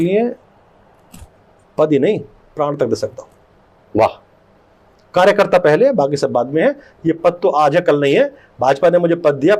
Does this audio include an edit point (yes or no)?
no